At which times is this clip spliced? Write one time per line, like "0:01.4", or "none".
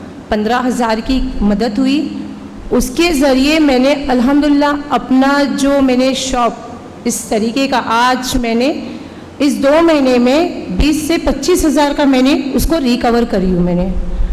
none